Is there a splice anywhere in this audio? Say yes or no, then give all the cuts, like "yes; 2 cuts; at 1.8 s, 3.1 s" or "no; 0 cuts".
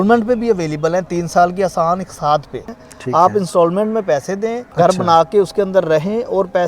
yes; 2 cuts; at 2.7 s, 4.6 s